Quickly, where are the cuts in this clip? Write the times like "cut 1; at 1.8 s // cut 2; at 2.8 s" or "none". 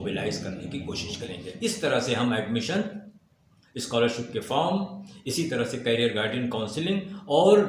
cut 1; at 1.4 s